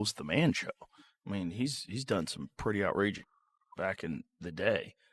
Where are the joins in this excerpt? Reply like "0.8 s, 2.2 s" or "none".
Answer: none